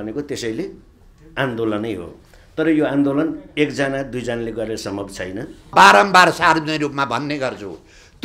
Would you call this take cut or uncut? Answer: cut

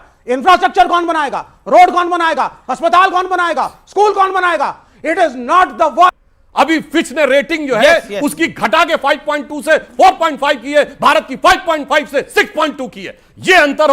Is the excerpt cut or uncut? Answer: cut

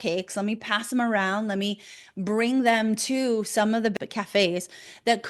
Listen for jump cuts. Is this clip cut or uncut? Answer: cut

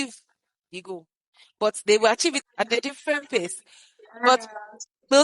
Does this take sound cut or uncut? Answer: cut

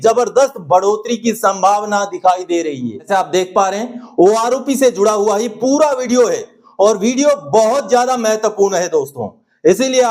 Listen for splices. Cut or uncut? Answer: cut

